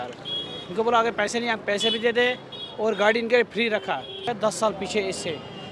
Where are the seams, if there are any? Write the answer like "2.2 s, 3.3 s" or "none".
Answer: 4.3 s